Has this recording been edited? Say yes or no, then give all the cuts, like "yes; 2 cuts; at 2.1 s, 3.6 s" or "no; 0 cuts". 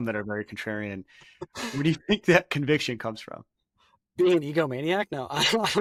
no; 0 cuts